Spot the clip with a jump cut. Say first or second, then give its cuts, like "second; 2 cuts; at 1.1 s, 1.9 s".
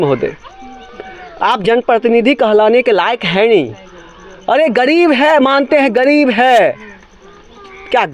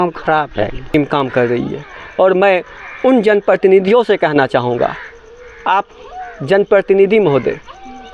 second; 1 cut; at 0.9 s